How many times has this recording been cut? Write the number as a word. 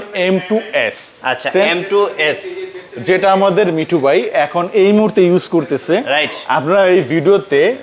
zero